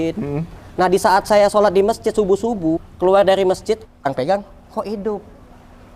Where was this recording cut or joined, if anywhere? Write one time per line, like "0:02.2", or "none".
0:02.9
0:04.0